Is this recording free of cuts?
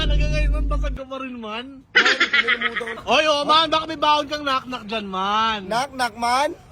no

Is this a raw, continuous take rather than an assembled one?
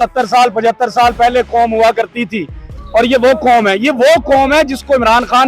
yes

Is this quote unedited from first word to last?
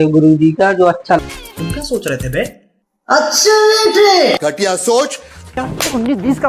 no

